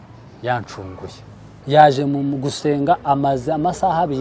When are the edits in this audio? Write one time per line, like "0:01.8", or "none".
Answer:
0:01.5